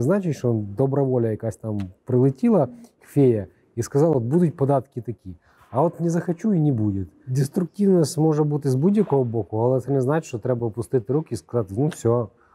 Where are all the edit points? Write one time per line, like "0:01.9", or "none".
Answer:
0:07.3